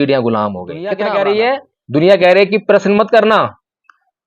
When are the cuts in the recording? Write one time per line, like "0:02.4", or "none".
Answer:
0:01.0